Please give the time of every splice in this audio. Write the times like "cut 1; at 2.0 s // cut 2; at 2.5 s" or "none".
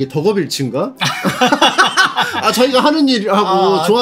none